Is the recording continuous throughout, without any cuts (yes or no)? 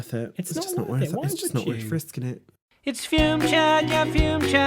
no